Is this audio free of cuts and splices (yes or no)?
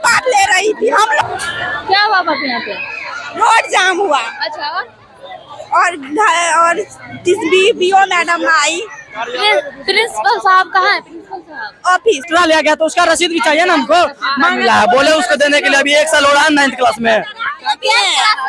no